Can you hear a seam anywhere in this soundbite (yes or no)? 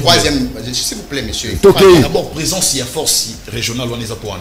yes